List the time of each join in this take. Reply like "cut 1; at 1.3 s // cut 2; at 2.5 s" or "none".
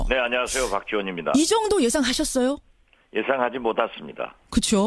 cut 1; at 2.5 s